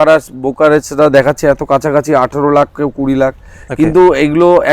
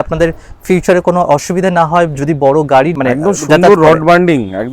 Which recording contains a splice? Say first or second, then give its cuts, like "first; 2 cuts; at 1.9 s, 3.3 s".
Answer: second; 1 cut; at 2.9 s